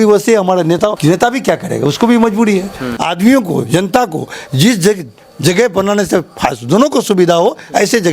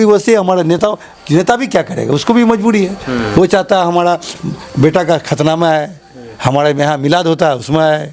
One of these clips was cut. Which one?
first; 2 cuts; at 1.0 s, 2.9 s

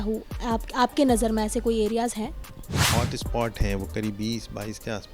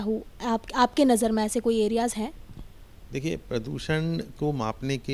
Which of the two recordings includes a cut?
first; 1 cut; at 2.8 s

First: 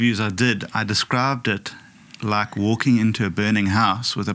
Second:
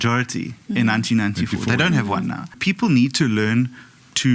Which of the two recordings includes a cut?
second; 1 cut; at 2.6 s

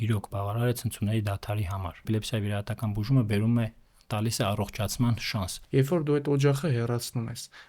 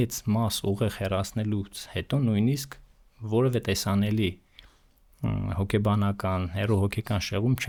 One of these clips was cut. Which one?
first; 2 cuts; at 2.0 s, 5.5 s

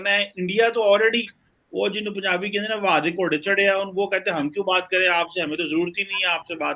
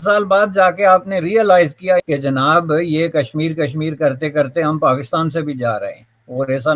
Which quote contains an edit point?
second; 1 cut; at 2.0 s

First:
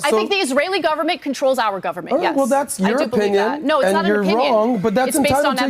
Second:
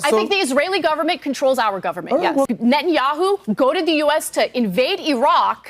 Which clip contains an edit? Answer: second; 1 cut; at 2.5 s

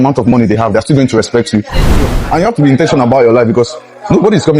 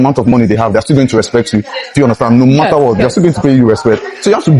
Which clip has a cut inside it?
first; 1 cut; at 2.0 s

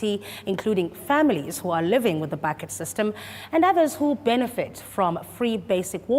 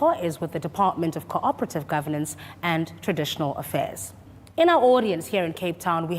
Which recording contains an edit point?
first; 1 cut; at 4.8 s

